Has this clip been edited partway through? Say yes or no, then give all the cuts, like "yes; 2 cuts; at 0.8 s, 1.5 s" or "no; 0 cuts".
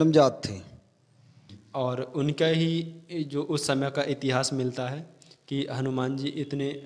yes; 1 cut; at 1.6 s